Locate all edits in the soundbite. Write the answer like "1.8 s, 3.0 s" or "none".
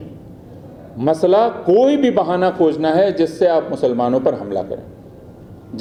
none